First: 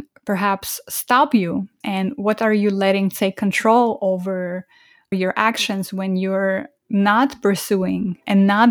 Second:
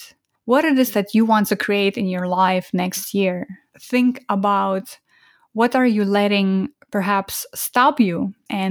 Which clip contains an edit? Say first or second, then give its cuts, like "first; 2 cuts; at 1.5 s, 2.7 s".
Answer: second; 1 cut; at 3.6 s